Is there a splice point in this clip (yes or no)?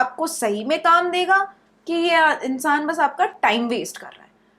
no